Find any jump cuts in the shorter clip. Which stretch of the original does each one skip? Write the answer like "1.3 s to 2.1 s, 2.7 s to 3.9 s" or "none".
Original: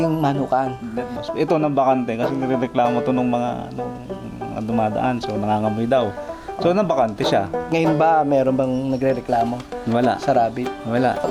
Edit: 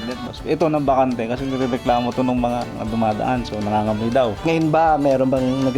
3.6 s to 4.5 s, 6.1 s to 7.6 s